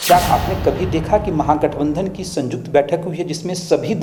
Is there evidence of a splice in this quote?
no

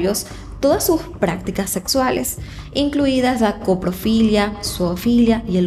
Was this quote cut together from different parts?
no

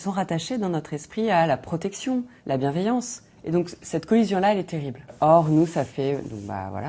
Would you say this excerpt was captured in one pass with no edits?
yes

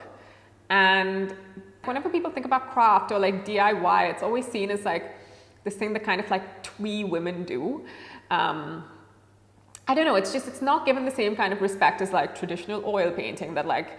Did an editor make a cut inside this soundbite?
yes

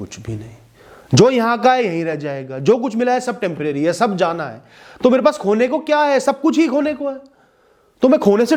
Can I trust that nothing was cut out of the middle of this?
yes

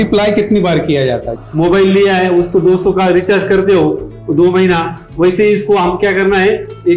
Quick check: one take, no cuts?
no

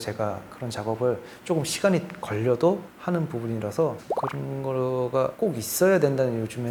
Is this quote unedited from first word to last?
yes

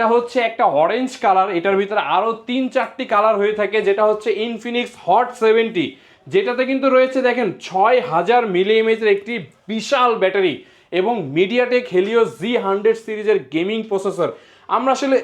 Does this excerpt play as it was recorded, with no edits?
yes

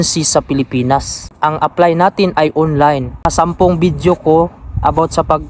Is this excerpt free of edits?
no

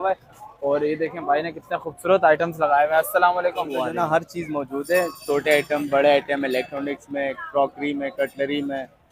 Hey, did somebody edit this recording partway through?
yes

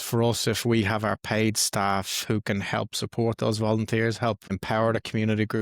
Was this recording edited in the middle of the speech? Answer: yes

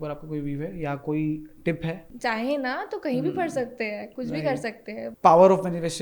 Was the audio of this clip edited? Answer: yes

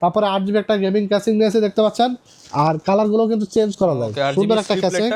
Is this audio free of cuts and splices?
yes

